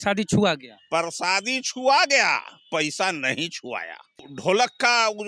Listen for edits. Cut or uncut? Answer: cut